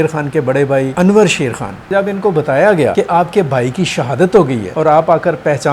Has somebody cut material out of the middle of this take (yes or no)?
yes